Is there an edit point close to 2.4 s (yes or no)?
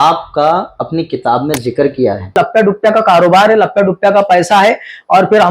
yes